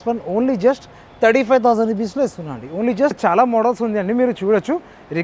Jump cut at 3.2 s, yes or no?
yes